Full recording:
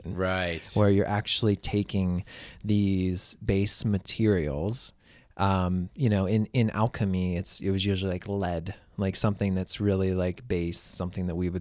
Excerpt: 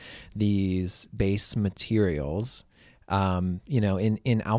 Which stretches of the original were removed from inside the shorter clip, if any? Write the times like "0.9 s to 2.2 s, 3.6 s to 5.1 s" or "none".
none